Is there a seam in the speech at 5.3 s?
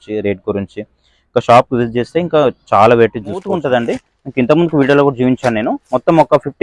no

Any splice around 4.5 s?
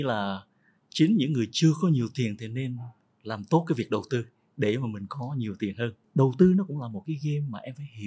no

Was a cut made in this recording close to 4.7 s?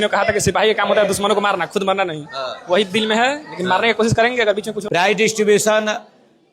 yes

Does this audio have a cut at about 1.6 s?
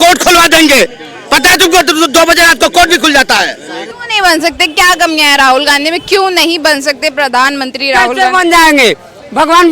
no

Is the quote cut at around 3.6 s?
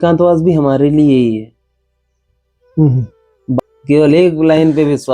yes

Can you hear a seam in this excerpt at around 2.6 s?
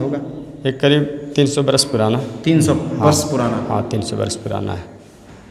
no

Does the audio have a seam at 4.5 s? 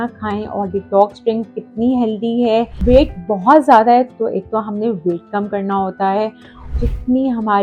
no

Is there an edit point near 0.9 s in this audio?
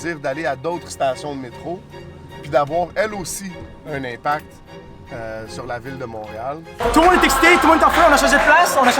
no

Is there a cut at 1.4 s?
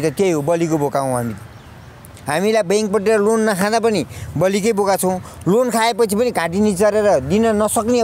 no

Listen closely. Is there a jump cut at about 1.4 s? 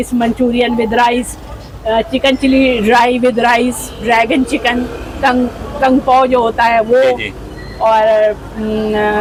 no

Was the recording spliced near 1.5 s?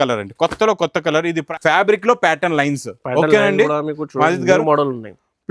yes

